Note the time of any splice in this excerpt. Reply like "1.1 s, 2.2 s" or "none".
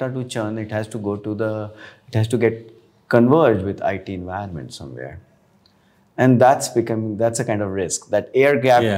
none